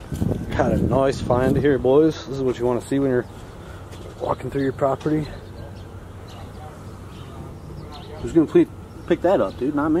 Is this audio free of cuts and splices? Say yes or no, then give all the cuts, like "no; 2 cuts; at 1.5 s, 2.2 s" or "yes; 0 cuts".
yes; 0 cuts